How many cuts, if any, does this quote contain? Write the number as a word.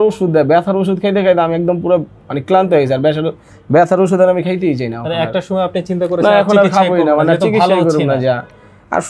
zero